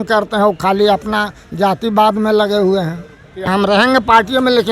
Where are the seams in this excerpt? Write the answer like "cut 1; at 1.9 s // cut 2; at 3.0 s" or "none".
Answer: cut 1; at 3.5 s